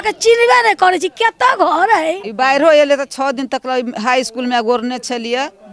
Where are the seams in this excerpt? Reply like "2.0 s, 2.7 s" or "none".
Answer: 2.3 s